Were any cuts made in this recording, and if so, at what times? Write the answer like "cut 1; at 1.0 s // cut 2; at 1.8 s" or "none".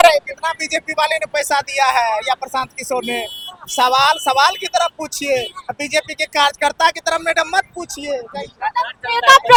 none